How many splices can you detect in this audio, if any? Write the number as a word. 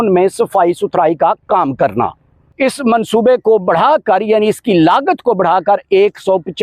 one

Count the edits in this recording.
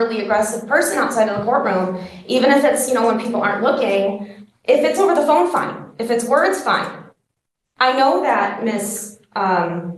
zero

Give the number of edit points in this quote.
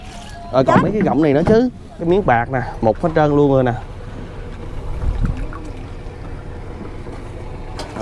one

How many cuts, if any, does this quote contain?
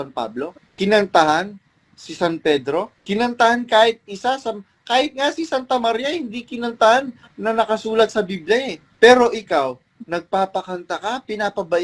zero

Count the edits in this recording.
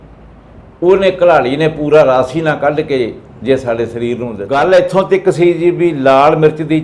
one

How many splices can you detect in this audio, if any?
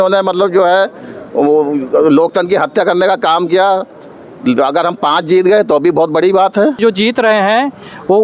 one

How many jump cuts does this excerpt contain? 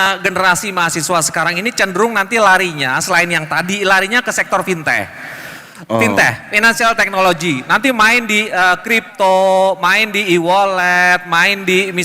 zero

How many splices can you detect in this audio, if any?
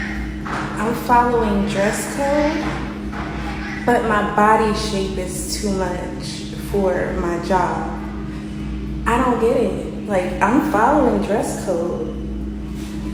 zero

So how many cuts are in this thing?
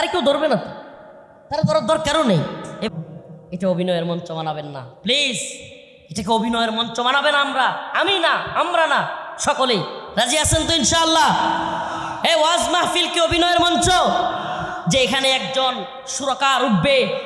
one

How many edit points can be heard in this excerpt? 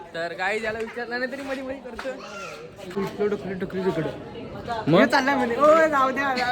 one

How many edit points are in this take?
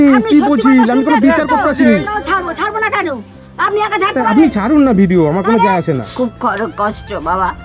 two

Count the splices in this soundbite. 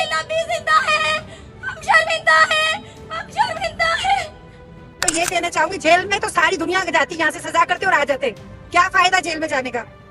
one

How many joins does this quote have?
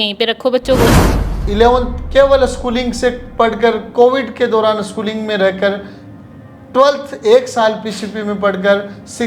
one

